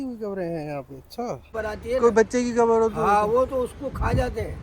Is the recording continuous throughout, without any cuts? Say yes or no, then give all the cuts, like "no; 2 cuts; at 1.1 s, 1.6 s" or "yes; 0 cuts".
no; 1 cut; at 1.5 s